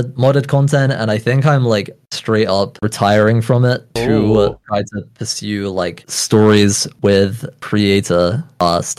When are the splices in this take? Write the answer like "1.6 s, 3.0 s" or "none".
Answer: none

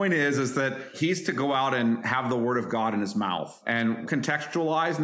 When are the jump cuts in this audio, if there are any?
0.9 s, 2.1 s, 4.0 s

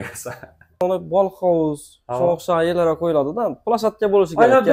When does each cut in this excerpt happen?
1.0 s

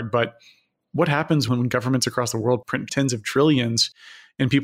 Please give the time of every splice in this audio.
1.5 s, 2.9 s

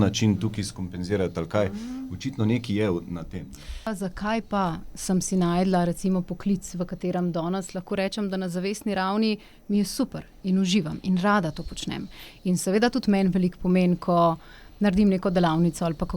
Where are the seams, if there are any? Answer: 3.9 s

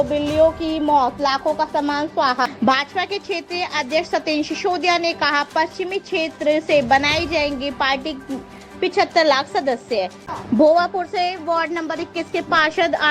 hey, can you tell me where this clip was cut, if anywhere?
2.5 s, 10.2 s

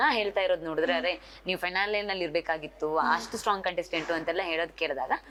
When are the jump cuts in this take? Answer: none

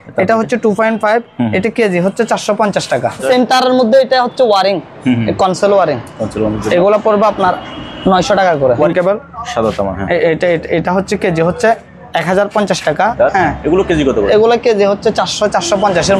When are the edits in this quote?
3.2 s, 8.9 s, 13.1 s

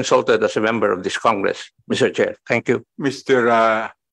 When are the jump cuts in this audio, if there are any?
2.9 s

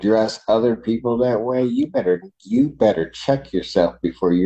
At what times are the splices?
none

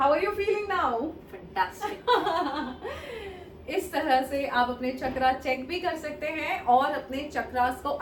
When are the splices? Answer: none

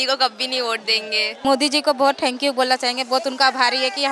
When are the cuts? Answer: 1.4 s

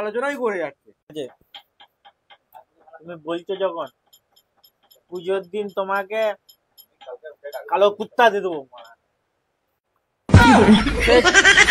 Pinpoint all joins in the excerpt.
1.1 s

